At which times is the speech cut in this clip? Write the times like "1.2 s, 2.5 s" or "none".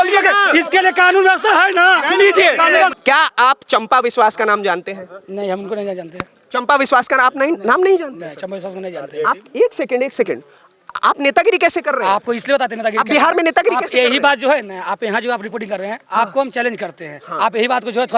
2.9 s